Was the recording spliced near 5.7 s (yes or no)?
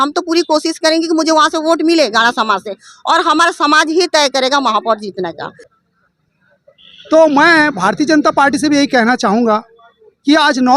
yes